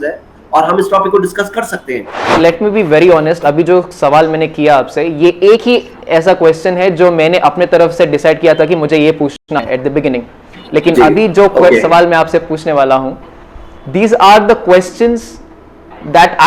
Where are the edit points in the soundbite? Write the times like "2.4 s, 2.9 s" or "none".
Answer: 2.3 s